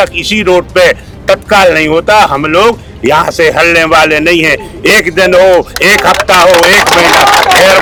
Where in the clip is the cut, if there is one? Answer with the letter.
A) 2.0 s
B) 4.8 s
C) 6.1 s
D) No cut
D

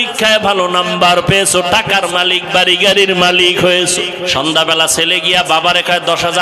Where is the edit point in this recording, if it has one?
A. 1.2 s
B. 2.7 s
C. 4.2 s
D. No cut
C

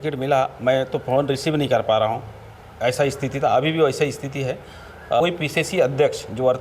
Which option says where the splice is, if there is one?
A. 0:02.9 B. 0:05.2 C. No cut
B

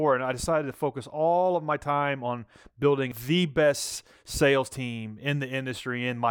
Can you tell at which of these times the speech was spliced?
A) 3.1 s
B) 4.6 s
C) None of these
A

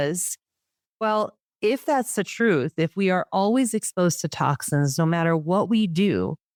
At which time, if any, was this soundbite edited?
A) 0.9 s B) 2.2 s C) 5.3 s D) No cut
D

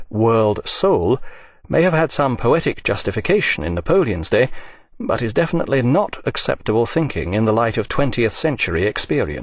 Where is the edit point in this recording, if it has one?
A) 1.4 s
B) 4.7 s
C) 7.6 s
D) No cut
A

